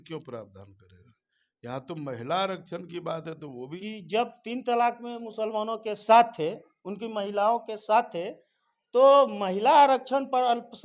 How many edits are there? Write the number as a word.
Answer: one